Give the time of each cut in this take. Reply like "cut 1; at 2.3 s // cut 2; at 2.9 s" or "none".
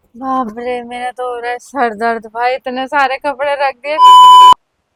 none